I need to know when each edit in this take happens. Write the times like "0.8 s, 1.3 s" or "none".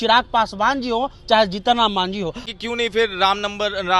2.5 s